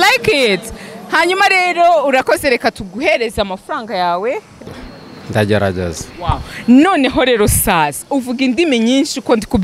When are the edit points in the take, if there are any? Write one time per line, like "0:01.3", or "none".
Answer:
0:04.6